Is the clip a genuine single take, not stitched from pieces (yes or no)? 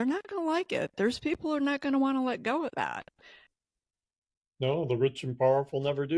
yes